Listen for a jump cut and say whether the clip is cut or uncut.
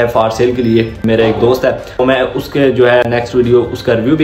cut